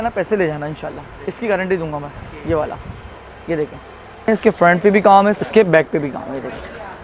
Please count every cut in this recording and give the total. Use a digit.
2